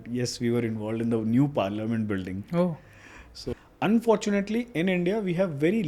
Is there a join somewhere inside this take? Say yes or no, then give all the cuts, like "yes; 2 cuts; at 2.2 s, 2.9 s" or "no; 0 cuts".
yes; 1 cut; at 3.5 s